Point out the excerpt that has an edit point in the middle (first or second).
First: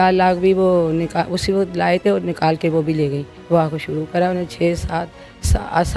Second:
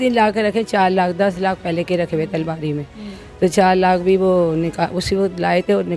first